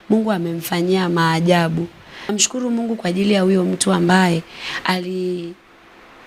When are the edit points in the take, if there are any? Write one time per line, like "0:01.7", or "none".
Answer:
0:02.3